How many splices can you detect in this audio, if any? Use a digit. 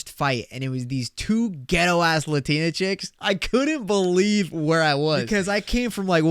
1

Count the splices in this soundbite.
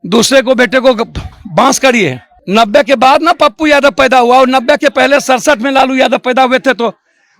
1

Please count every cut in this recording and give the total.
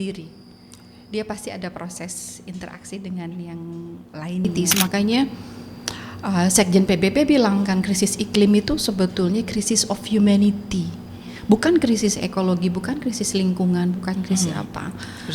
1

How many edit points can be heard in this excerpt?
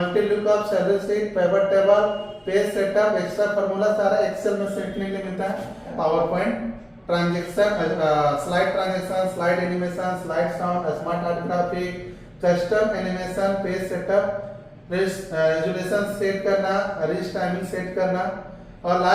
1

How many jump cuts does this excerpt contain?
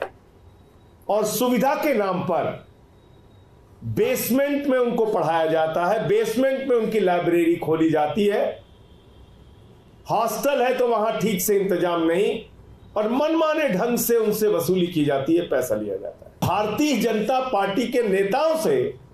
1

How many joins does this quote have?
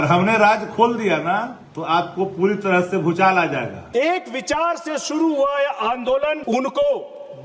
3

